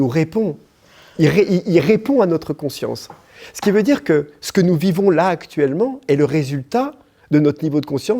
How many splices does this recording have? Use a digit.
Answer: 0